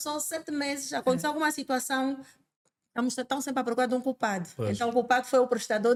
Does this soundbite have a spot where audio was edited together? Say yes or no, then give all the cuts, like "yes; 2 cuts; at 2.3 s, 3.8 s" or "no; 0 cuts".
no; 0 cuts